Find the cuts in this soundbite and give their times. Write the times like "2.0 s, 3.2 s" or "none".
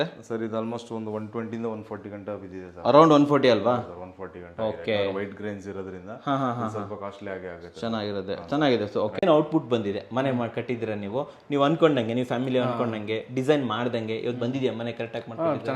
9.2 s